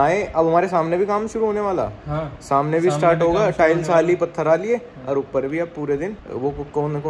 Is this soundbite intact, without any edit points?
yes; 0 cuts

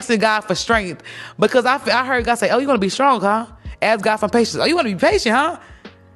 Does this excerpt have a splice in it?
no; 0 cuts

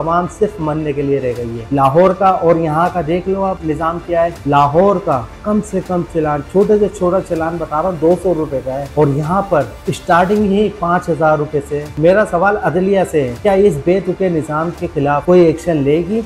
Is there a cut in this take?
yes; 2 cuts; at 1.6 s, 11.9 s

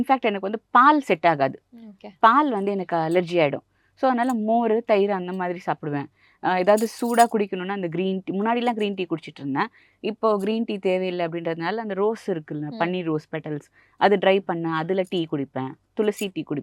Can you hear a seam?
no; 0 cuts

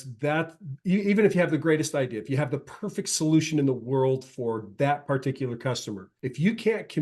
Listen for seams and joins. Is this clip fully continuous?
no; 1 cut; at 6.1 s

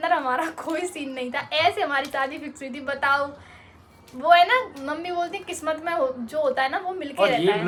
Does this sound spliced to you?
no; 0 cuts

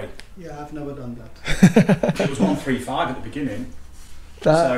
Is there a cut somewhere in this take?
no; 0 cuts

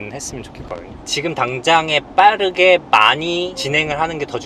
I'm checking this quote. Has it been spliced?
yes; 1 cut; at 1.0 s

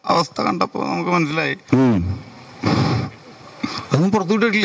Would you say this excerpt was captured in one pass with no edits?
no; 1 cut; at 1.6 s

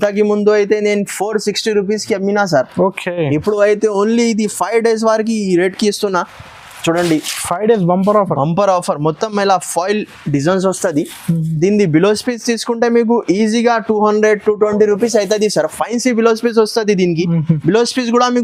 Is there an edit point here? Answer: no; 0 cuts

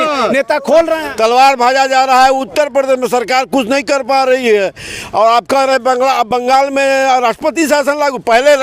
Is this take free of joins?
no; 1 cut; at 1.0 s

